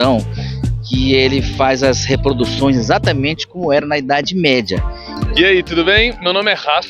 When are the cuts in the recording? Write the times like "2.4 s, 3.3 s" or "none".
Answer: 5.2 s